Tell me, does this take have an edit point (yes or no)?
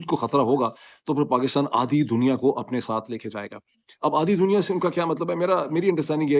no